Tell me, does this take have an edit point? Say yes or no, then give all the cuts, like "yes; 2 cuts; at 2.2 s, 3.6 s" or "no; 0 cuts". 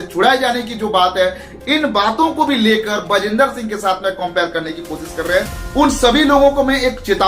yes; 1 cut; at 5.6 s